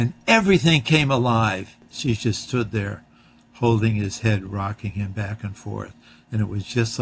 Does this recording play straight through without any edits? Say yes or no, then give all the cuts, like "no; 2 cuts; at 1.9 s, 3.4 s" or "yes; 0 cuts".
no; 1 cut; at 1.9 s